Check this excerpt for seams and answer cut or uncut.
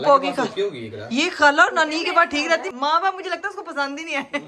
uncut